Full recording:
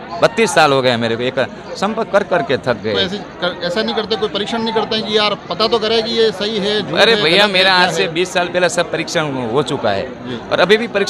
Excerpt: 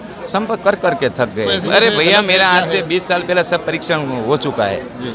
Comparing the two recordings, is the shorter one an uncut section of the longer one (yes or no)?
no